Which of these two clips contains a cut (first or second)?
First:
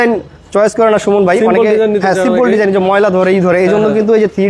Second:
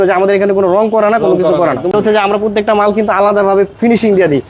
second